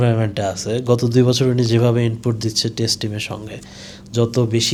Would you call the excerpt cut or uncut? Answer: uncut